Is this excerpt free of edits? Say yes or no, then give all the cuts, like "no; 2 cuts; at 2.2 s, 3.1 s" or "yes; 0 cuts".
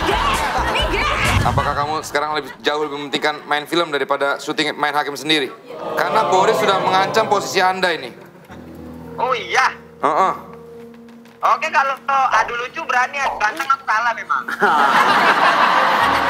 no; 2 cuts; at 1.4 s, 6.1 s